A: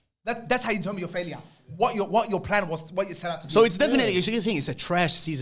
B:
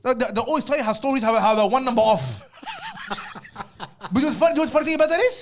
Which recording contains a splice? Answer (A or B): A